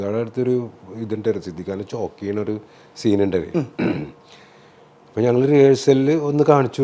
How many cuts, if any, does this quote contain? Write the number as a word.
zero